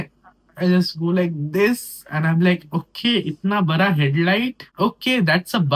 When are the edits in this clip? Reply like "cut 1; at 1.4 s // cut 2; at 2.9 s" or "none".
cut 1; at 4.6 s